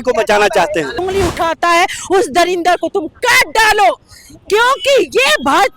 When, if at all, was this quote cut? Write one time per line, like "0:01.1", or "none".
0:01.0